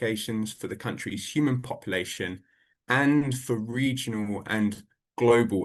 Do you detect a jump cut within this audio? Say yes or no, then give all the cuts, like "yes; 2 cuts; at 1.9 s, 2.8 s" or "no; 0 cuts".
no; 0 cuts